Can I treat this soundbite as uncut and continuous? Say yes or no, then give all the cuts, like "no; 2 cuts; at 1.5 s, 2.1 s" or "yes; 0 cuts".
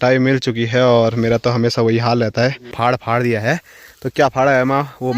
no; 1 cut; at 2.7 s